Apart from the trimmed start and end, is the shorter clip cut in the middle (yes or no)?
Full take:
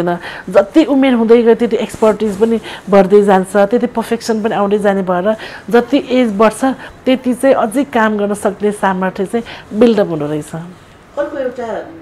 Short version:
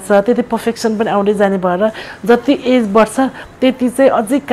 no